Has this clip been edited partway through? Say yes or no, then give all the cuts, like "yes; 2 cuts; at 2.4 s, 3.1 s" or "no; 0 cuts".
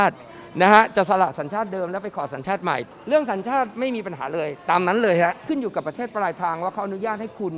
yes; 2 cuts; at 2.8 s, 5.4 s